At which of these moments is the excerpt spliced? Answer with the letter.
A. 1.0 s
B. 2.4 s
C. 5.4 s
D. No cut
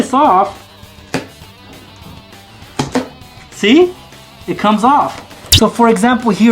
C